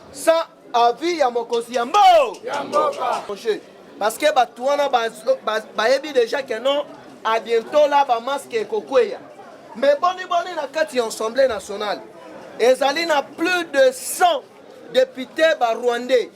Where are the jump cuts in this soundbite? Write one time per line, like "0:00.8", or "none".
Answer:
0:03.3

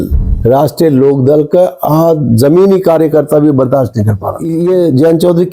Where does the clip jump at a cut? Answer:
0:04.4

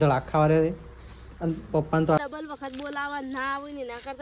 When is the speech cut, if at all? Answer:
0:02.2

